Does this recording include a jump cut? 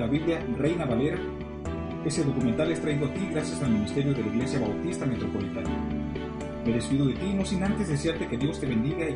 yes; 1 cut; at 5.4 s

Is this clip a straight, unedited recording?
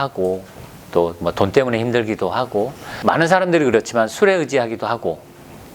no; 1 cut; at 2.9 s

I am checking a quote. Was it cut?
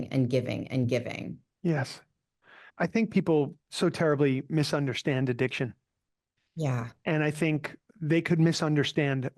yes; 3 cuts; at 2.6 s, 3.6 s, 7.8 s

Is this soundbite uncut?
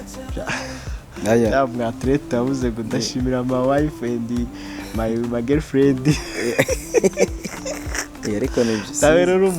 yes; 0 cuts

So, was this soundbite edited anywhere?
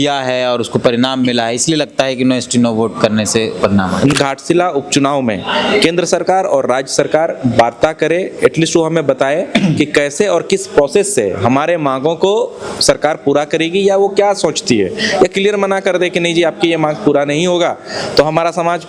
yes; 1 cut; at 4.1 s

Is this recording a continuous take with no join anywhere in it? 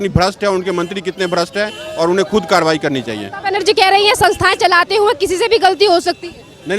yes; 0 cuts

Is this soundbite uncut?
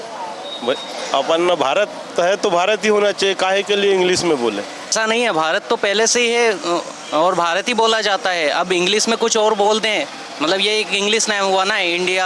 no; 1 cut; at 4.9 s

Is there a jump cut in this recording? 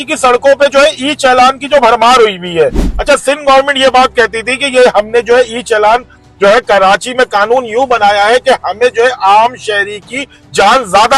yes; 1 cut; at 2.9 s

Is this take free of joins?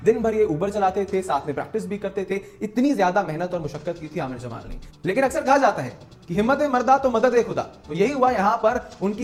yes; 0 cuts

